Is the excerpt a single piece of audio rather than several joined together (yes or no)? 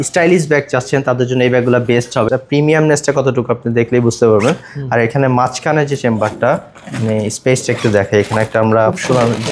no